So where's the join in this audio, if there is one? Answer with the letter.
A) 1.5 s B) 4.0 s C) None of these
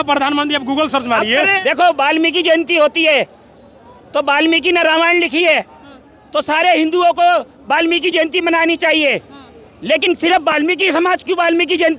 A